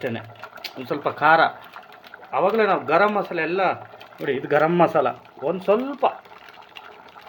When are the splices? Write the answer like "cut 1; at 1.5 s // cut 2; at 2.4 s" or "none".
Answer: none

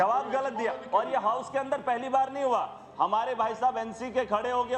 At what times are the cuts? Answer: none

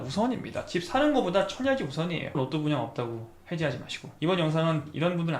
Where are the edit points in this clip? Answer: cut 1; at 2.4 s

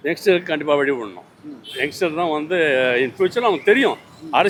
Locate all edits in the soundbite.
none

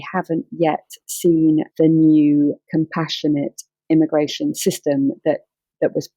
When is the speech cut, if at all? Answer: none

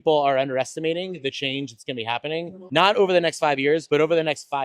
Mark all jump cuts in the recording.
cut 1; at 2.6 s // cut 2; at 3.8 s

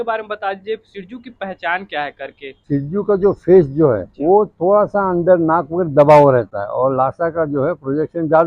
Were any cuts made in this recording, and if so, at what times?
cut 1; at 2.6 s // cut 2; at 4.1 s

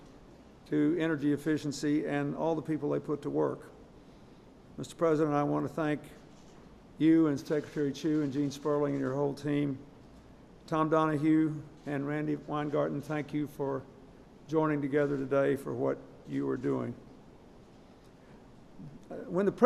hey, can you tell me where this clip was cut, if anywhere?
cut 1; at 5.5 s

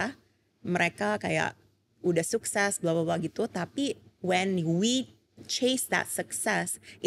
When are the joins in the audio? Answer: none

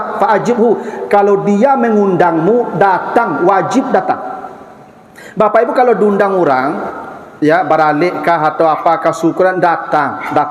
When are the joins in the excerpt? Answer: none

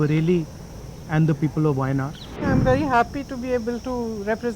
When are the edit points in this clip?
cut 1; at 2.4 s

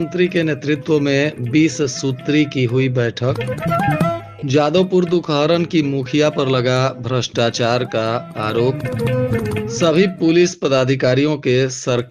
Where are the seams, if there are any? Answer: none

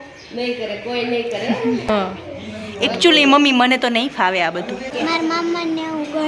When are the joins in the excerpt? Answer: cut 1; at 1.9 s // cut 2; at 4.9 s

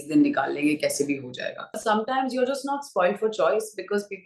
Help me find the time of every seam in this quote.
cut 1; at 1.8 s

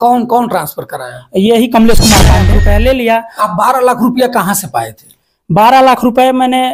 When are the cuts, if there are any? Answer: cut 1; at 2.5 s

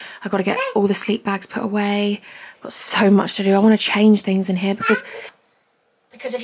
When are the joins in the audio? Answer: cut 1; at 5.3 s

